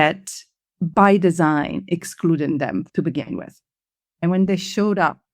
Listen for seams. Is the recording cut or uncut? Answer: cut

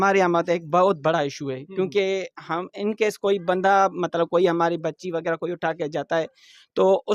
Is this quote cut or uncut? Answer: uncut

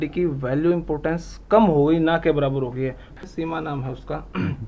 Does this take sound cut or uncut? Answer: cut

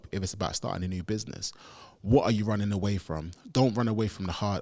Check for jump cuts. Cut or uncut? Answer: uncut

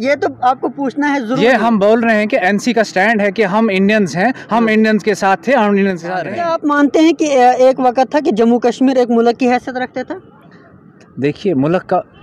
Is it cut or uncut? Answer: cut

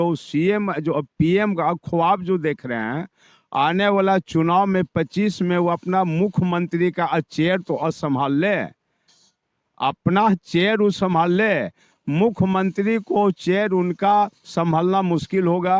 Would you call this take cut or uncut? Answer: uncut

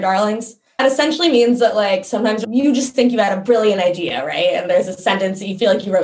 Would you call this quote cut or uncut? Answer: cut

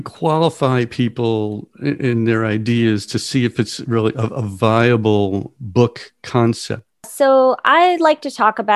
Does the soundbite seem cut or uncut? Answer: cut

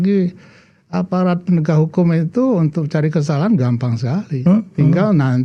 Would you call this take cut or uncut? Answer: uncut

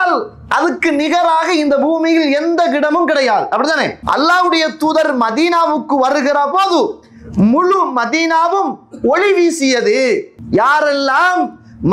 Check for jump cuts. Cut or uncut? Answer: cut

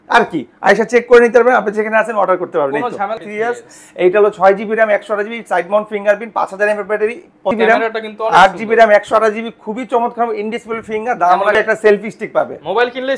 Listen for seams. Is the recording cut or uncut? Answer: cut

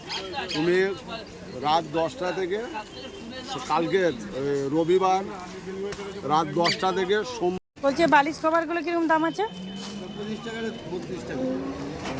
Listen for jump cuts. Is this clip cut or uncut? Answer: cut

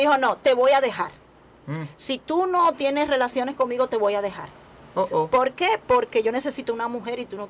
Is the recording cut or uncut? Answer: uncut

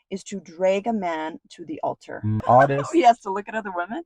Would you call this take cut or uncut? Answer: cut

